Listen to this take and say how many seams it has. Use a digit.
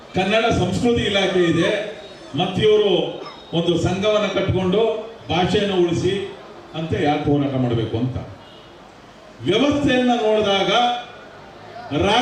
0